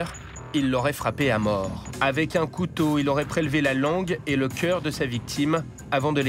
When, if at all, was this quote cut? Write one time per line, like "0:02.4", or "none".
0:01.8